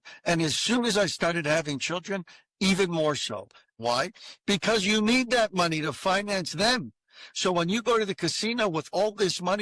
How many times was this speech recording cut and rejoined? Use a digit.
1